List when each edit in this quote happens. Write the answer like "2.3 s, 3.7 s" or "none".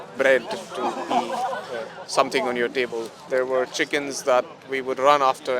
3.3 s